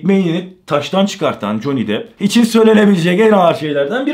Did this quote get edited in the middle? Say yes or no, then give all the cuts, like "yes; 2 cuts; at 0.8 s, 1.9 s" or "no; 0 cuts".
no; 0 cuts